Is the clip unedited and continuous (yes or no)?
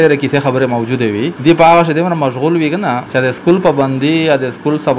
no